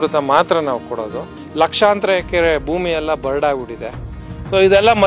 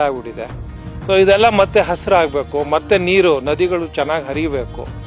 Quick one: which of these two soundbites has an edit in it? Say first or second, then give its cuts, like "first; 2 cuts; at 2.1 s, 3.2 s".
first; 1 cut; at 1.3 s